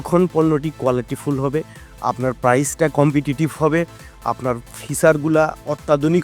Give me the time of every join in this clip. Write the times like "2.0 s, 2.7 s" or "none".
none